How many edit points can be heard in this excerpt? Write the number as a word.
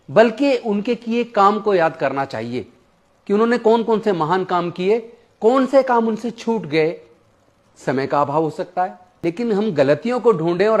one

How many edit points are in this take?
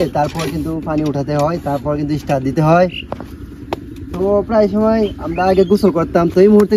zero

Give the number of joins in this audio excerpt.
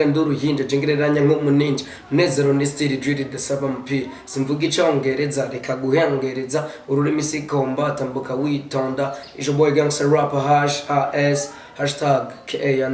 zero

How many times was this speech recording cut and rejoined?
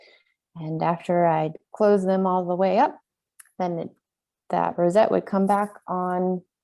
zero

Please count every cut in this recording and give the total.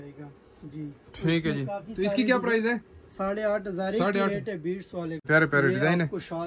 one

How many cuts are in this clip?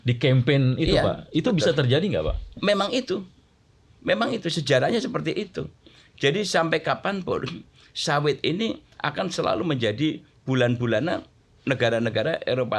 zero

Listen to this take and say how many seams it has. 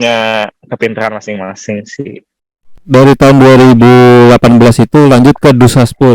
one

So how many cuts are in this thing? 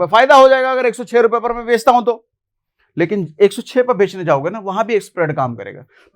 zero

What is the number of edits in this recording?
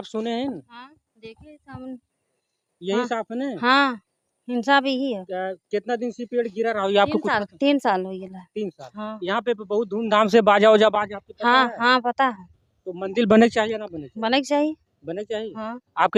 zero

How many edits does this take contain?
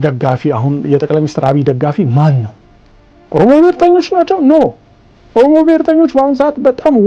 zero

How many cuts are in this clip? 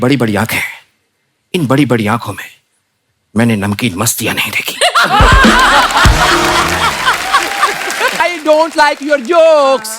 one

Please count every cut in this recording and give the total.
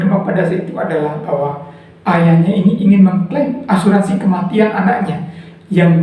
zero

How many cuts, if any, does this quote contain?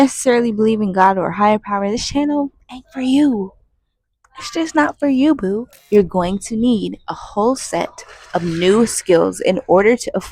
one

